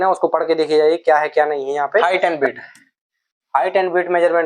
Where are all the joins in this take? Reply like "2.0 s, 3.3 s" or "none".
2.0 s